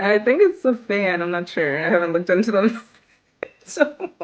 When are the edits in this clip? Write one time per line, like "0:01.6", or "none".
none